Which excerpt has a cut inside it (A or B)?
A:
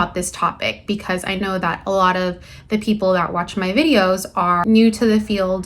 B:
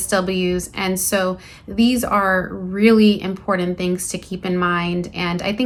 A